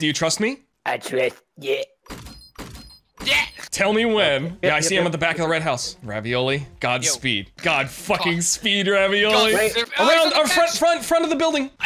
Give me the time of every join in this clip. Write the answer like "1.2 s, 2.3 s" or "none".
4.6 s